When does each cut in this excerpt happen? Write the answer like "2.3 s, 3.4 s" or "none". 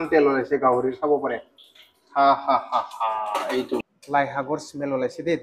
4.0 s